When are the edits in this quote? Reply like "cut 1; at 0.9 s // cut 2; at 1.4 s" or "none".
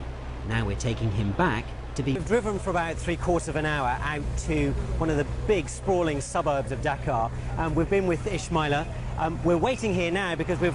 none